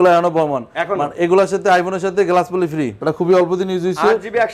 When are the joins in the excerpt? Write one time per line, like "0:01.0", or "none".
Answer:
0:02.9